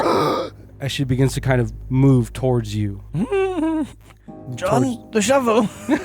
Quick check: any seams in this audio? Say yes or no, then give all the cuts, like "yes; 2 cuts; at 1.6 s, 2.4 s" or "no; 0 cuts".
yes; 1 cut; at 1.8 s